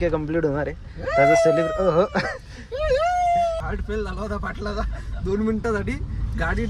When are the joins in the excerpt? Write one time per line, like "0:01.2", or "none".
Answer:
0:03.6